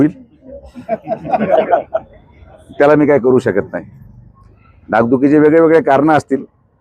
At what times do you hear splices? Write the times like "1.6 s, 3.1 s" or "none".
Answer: none